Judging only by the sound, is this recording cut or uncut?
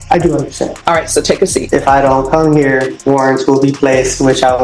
cut